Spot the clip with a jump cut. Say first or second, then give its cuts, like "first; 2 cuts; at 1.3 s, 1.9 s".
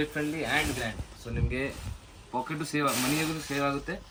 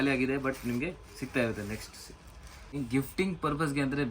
second; 1 cut; at 2.8 s